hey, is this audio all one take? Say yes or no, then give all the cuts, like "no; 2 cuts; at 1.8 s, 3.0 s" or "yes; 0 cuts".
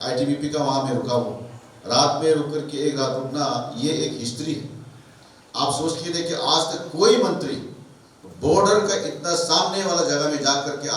yes; 0 cuts